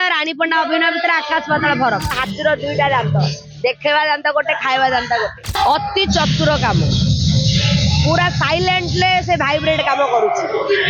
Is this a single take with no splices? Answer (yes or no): no